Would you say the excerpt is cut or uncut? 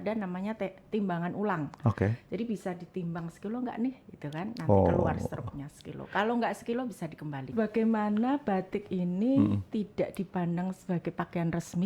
cut